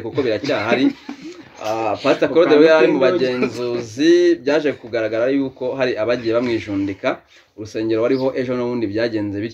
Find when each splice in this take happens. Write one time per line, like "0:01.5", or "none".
none